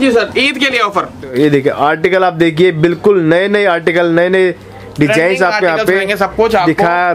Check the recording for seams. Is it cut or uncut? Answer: cut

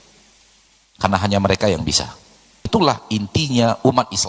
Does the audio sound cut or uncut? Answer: cut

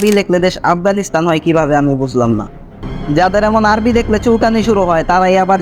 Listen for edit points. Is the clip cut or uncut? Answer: cut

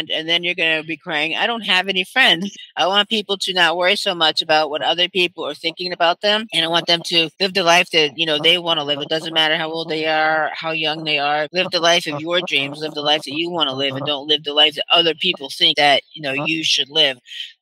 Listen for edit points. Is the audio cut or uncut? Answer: cut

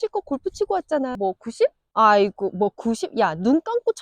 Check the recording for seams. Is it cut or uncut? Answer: cut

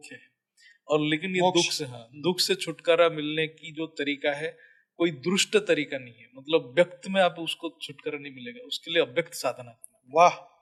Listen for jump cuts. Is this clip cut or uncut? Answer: uncut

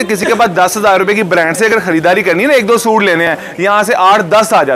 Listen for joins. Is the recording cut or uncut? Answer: uncut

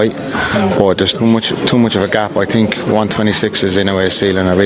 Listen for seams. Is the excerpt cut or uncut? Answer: uncut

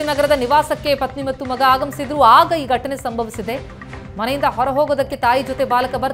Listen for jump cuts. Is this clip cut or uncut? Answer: uncut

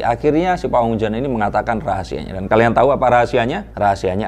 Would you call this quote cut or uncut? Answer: uncut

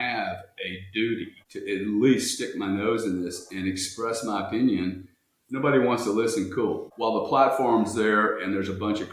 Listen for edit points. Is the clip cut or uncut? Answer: cut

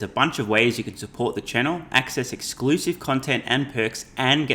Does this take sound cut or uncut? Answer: uncut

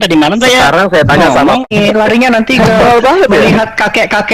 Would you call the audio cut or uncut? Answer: cut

